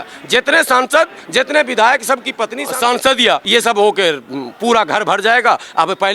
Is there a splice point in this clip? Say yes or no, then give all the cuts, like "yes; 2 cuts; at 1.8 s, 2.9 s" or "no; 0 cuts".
yes; 2 cuts; at 2.6 s, 3.4 s